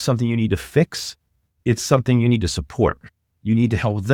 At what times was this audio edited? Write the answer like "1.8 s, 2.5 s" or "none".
none